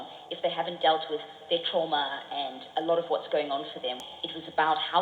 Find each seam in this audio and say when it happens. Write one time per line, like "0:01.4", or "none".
0:04.0